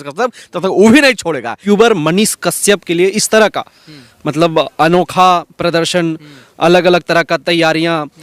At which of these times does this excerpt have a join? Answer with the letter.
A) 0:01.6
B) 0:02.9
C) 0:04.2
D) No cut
A